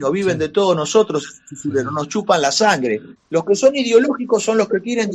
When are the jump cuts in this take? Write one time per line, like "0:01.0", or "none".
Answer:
0:03.1